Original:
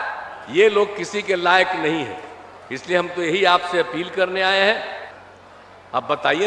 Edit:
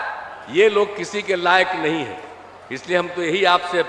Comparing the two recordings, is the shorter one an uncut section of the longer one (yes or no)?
yes